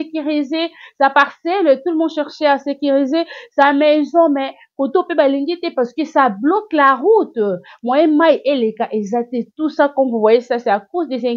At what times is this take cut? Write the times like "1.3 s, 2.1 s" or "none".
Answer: none